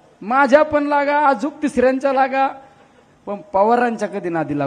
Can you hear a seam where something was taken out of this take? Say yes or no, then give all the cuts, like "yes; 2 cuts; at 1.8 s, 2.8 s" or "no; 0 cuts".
no; 0 cuts